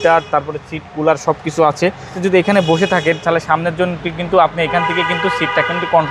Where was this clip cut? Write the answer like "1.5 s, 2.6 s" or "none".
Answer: 2.1 s